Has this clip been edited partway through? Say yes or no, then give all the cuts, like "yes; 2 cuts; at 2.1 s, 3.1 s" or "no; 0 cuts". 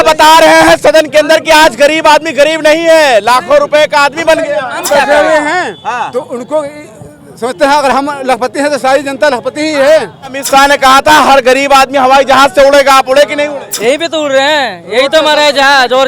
yes; 3 cuts; at 4.7 s, 10.4 s, 13.7 s